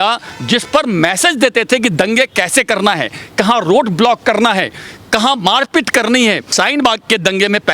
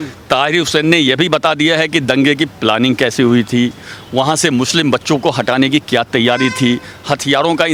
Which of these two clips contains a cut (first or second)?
first